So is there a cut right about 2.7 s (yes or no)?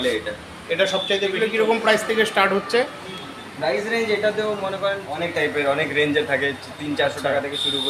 no